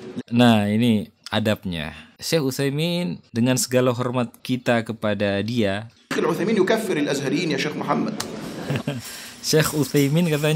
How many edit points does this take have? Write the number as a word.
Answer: two